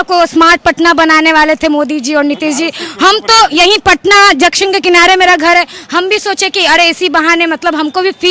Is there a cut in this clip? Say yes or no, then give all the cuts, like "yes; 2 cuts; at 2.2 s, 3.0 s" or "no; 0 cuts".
no; 0 cuts